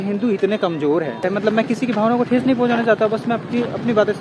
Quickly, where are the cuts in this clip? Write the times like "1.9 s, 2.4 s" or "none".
1.2 s